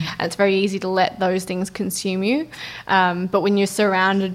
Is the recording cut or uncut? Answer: uncut